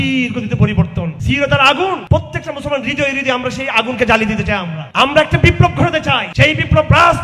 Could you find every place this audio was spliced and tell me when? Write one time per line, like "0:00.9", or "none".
0:01.1
0:02.0
0:04.8
0:06.3